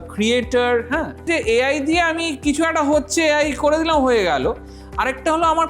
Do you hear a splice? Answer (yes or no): yes